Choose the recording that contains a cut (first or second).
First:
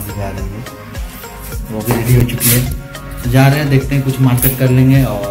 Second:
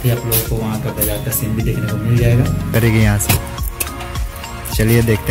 second